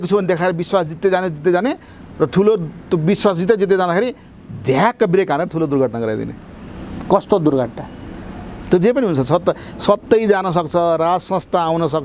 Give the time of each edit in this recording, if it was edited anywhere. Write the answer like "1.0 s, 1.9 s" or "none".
none